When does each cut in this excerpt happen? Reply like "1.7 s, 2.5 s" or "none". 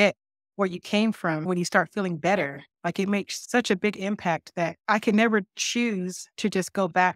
1.5 s, 3.4 s, 4.8 s, 6.2 s